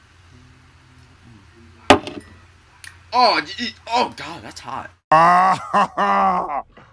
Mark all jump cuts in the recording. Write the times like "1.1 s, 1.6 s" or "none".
4.9 s